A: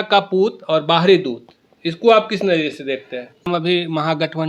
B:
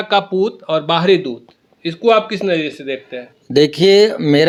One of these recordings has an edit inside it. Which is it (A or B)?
A